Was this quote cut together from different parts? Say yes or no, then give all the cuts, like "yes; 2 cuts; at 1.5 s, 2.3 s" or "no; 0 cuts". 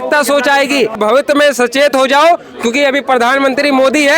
yes; 1 cut; at 0.9 s